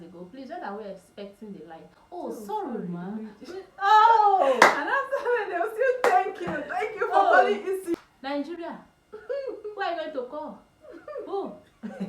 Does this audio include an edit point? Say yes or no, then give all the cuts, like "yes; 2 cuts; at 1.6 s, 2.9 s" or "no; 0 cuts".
yes; 1 cut; at 7.9 s